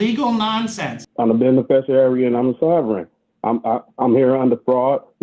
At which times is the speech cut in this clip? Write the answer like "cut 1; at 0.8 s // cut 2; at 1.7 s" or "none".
cut 1; at 1.0 s